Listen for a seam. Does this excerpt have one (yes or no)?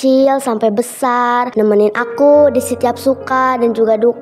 yes